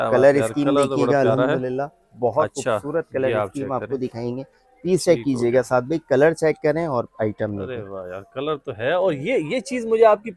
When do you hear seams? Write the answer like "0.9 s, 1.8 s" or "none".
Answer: none